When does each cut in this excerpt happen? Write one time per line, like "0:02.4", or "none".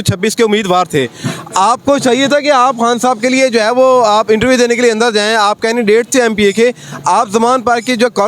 none